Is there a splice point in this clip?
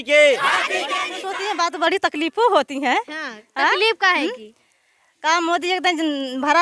yes; 1 cut; at 1.0 s

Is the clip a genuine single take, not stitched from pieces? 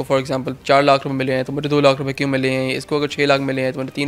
yes; 0 cuts

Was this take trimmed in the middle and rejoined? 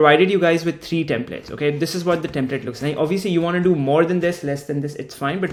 no; 0 cuts

